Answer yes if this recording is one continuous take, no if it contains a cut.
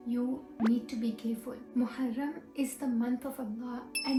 yes